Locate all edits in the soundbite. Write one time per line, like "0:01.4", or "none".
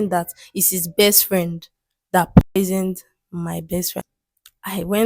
0:03.9